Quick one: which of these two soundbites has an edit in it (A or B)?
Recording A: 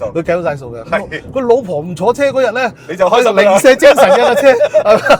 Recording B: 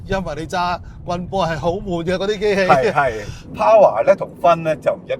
B